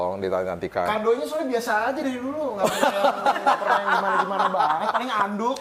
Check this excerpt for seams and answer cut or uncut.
uncut